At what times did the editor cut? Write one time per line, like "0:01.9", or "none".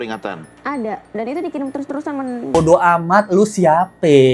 0:02.6